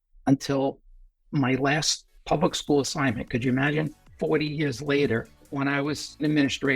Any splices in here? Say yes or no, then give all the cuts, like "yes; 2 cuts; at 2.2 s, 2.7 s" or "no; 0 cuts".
yes; 3 cuts; at 1.2 s, 4.0 s, 5.8 s